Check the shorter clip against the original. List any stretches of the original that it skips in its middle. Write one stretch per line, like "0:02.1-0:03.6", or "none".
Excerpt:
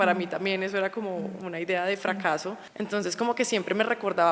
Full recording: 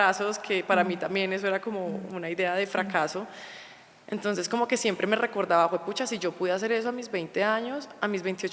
0:03.3-0:04.0